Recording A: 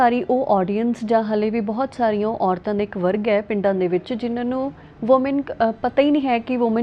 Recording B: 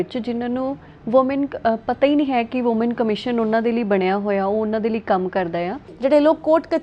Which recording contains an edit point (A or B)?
B